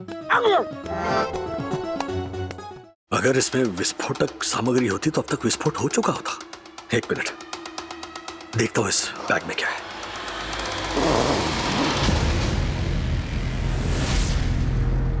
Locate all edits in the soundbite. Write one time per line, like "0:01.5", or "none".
0:02.7